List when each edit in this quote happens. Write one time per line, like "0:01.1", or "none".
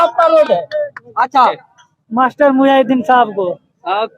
0:01.6